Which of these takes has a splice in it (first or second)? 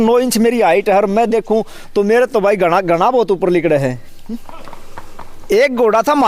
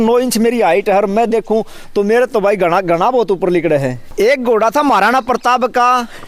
second